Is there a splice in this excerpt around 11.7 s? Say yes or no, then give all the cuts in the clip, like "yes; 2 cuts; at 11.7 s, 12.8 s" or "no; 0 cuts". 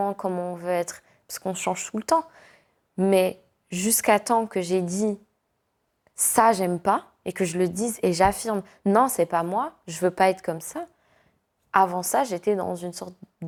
no; 0 cuts